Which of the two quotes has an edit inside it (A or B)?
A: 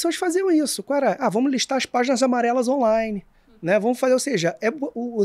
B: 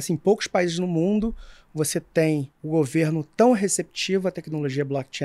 B